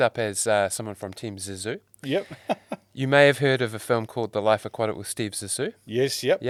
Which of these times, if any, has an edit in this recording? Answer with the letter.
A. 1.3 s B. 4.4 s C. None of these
C